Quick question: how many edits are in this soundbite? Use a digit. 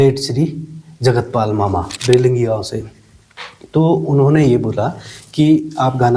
1